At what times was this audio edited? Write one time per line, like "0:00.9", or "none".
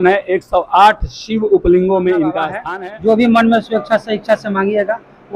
0:02.6